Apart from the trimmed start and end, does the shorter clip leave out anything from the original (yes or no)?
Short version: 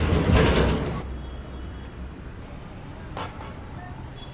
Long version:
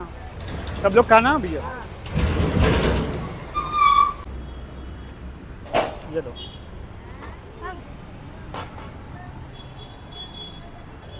yes